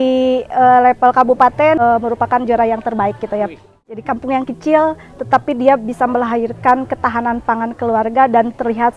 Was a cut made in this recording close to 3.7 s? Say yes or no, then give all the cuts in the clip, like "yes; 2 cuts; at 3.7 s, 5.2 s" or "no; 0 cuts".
yes; 2 cuts; at 1.8 s, 3.7 s